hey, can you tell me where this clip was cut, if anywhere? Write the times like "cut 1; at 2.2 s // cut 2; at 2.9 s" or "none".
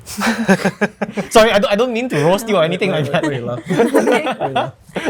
none

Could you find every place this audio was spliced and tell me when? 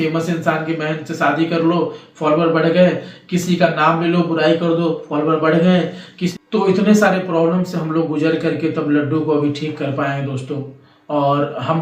none

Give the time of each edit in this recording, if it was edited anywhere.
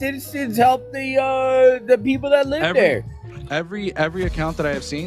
none

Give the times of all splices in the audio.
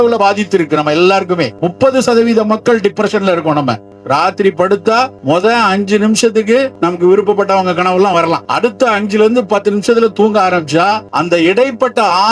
cut 1; at 1.6 s // cut 2; at 3.9 s // cut 3; at 5.2 s // cut 4; at 6.7 s // cut 5; at 8.5 s // cut 6; at 11.1 s

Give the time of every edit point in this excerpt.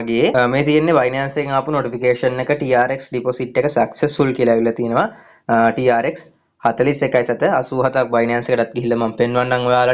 none

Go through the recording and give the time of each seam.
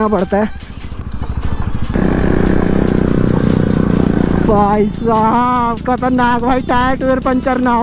cut 1; at 1.9 s

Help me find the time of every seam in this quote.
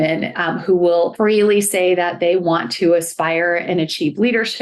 cut 1; at 1.1 s

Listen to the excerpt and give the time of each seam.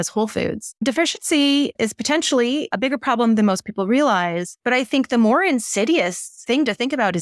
cut 1; at 0.8 s // cut 2; at 1.7 s // cut 3; at 2.7 s // cut 4; at 4.5 s // cut 5; at 6.3 s

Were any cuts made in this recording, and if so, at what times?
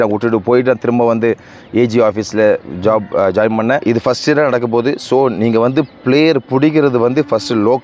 cut 1; at 3.8 s

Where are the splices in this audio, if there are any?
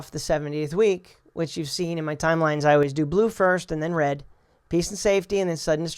none

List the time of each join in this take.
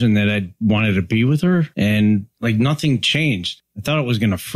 cut 1; at 1.7 s // cut 2; at 2.3 s // cut 3; at 3.5 s

